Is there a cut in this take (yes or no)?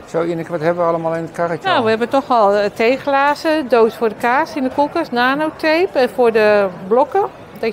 no